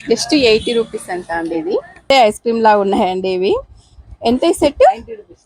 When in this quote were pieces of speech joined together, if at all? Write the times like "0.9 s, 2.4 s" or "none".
2.1 s